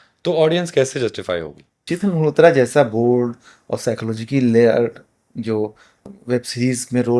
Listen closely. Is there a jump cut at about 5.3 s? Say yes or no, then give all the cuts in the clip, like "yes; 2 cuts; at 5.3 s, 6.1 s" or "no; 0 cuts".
no; 1 cut; at 1.9 s